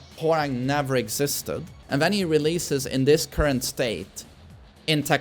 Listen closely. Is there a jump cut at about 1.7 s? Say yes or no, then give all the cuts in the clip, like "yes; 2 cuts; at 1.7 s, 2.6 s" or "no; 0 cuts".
yes; 1 cut; at 1.7 s